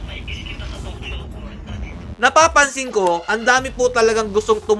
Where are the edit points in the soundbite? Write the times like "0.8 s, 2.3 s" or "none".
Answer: 2.1 s